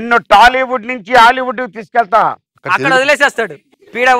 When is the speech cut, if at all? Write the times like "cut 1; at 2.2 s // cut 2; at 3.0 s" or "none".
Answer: none